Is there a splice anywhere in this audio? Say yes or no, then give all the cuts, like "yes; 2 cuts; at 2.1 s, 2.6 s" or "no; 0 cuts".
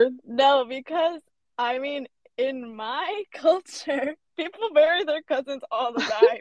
no; 0 cuts